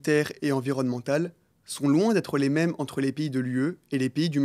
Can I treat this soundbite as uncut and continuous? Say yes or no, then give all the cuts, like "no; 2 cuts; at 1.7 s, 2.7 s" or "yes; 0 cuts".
yes; 0 cuts